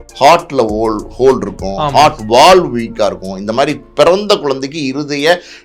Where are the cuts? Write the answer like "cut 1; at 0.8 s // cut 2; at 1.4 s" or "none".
none